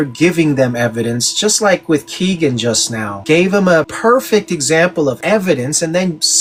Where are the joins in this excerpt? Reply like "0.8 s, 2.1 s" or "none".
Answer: none